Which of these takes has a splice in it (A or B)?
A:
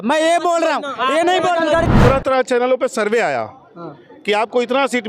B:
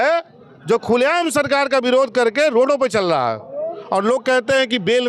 A